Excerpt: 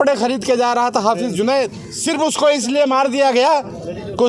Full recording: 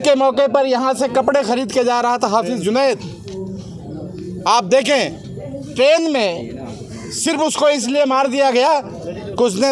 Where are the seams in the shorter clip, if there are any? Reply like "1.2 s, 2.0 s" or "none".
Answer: 1.9 s